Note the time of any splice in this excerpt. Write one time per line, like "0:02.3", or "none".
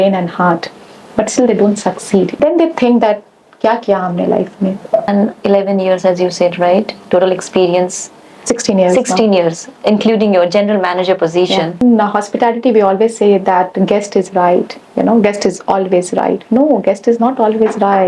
0:02.3
0:05.1
0:11.8